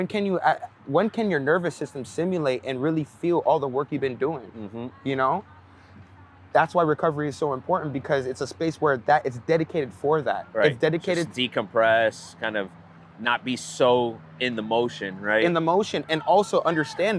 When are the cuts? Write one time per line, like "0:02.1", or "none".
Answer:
none